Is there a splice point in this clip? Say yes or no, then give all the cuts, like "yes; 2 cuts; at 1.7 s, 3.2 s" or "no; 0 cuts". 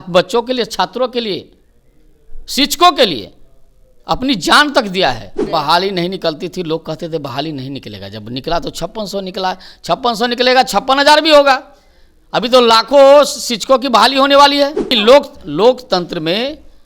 yes; 2 cuts; at 5.5 s, 15.0 s